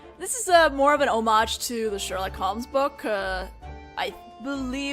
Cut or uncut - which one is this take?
cut